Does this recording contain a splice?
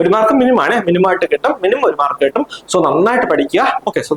no; 0 cuts

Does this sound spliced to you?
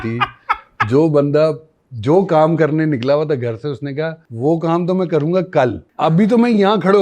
yes; 2 cuts; at 4.2 s, 5.8 s

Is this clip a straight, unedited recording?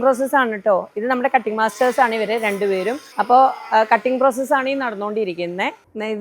yes; 0 cuts

